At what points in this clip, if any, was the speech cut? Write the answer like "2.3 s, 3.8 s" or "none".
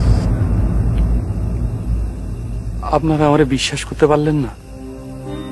none